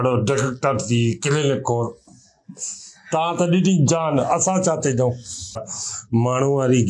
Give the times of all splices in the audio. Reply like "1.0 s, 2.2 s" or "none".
5.5 s